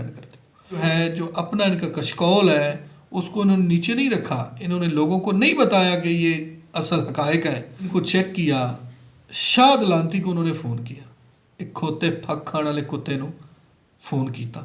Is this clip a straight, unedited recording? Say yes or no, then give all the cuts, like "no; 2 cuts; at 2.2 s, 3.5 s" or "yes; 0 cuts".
no; 2 cuts; at 0.8 s, 7.9 s